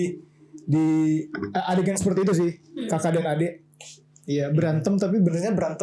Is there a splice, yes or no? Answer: no